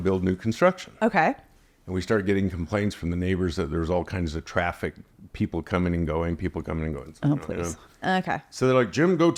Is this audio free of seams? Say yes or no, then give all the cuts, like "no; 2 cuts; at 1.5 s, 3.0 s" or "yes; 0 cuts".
yes; 0 cuts